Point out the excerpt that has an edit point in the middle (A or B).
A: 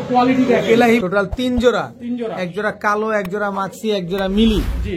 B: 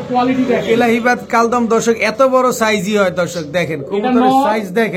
A